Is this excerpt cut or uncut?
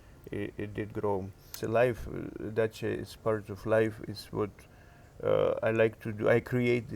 cut